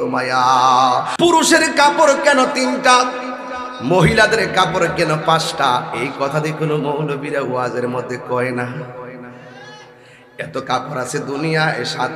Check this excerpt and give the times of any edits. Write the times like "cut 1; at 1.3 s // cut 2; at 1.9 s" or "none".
cut 1; at 1.1 s